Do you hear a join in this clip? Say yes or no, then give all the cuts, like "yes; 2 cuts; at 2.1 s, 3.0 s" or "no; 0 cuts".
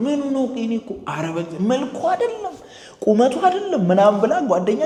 no; 0 cuts